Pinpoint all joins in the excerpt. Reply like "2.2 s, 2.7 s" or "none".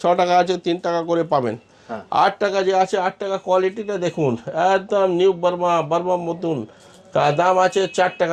none